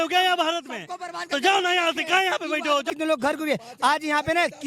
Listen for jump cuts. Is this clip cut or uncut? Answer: cut